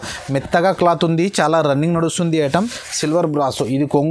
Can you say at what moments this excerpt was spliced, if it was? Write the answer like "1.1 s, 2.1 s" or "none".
2.5 s